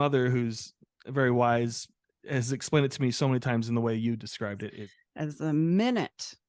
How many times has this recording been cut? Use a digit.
1